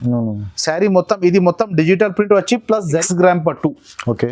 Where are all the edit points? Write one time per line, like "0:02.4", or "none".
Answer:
0:03.0